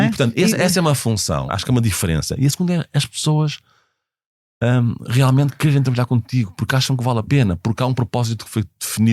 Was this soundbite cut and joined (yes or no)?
yes